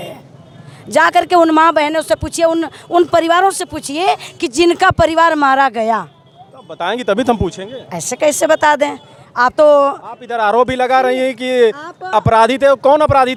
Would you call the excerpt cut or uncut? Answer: uncut